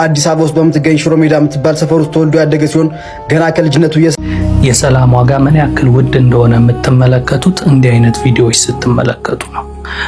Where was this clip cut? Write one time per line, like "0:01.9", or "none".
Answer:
0:04.1